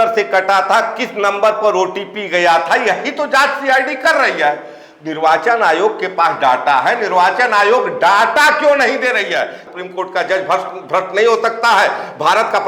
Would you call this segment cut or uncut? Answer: cut